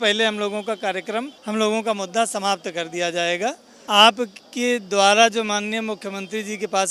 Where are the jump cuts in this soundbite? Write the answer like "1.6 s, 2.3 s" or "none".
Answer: 1.4 s, 3.7 s